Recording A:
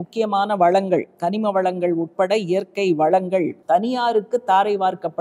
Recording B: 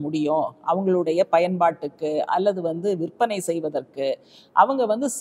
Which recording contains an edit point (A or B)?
A